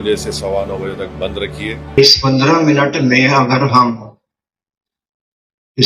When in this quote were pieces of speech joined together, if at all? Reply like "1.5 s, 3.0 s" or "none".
2.0 s